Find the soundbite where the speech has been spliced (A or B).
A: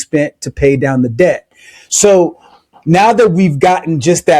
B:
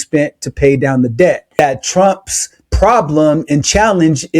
B